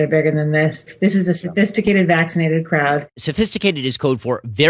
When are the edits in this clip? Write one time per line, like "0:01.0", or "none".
0:00.9
0:03.2